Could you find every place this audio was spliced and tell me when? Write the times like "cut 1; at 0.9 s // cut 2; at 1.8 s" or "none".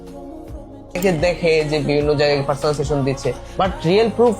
cut 1; at 1.0 s